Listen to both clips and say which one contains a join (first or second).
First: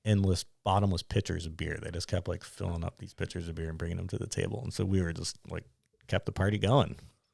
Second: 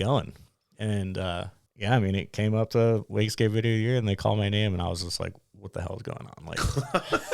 second